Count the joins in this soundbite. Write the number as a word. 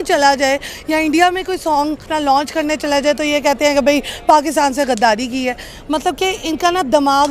one